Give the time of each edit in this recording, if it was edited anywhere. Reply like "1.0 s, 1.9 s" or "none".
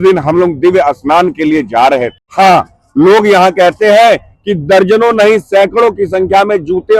2.2 s